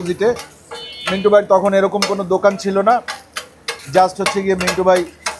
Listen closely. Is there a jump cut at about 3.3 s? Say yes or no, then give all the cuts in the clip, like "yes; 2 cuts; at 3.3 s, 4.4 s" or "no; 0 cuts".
no; 0 cuts